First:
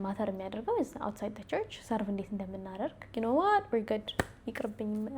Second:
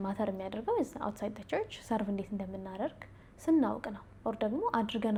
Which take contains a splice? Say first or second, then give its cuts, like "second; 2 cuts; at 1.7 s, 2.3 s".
first; 1 cut; at 3.1 s